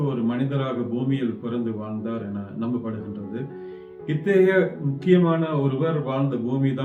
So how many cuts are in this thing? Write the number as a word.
zero